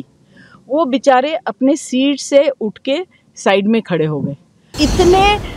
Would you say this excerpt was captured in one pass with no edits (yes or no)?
no